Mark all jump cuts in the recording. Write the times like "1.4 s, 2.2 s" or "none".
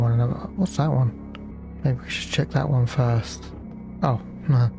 1.5 s, 3.6 s